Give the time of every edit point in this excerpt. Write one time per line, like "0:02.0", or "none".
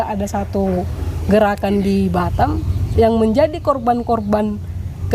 none